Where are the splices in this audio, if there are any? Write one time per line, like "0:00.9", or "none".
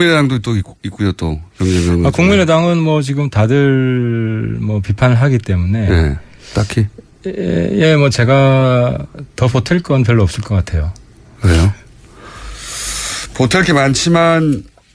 0:04.3